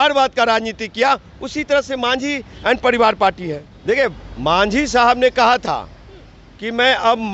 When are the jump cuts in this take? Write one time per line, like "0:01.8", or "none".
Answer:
0:03.7